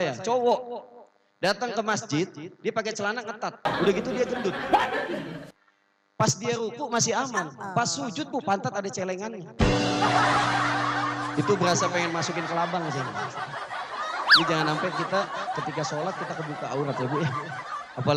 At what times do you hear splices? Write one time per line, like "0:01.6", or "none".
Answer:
none